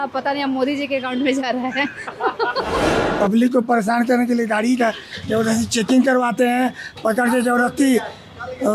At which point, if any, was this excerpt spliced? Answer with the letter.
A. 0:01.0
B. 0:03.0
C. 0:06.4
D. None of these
B